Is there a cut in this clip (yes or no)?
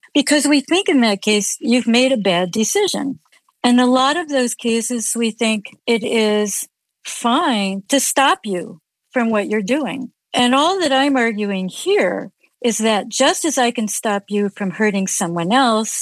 yes